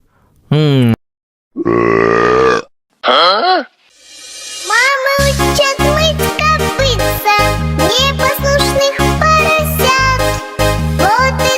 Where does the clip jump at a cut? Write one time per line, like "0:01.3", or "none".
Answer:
0:00.9